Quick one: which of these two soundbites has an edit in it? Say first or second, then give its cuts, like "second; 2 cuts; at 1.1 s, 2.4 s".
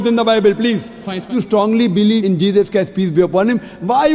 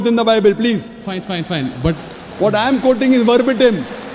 first; 1 cut; at 1.3 s